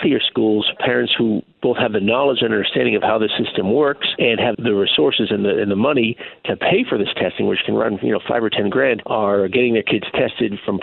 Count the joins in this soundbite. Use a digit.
0